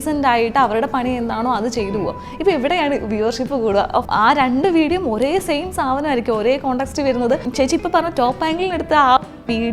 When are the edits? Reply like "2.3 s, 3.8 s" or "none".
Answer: 4.1 s, 7.5 s